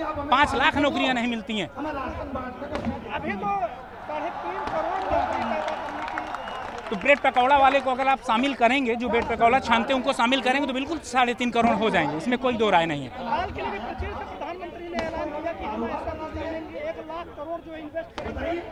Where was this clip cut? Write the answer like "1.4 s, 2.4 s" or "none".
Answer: none